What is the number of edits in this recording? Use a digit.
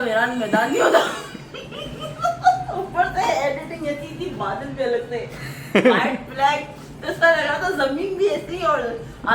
0